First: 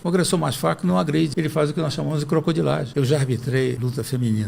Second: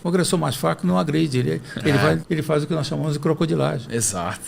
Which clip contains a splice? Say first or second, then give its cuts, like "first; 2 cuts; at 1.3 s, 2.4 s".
first; 2 cuts; at 1.3 s, 2.9 s